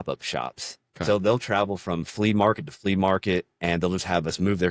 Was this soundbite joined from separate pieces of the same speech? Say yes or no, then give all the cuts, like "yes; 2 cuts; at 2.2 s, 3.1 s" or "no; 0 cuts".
no; 0 cuts